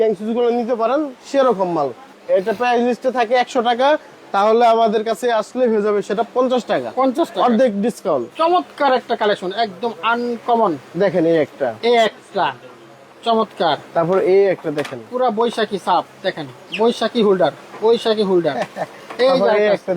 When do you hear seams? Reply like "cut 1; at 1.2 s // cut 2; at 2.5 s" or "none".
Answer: cut 1; at 2.1 s // cut 2; at 8.3 s